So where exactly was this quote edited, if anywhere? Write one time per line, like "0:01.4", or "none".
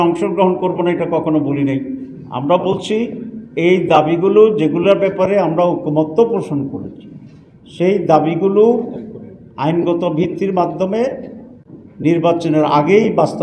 none